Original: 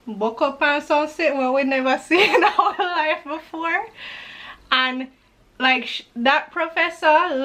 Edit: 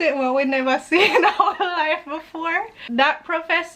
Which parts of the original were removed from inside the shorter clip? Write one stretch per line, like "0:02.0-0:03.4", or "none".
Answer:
0:04.0-0:06.0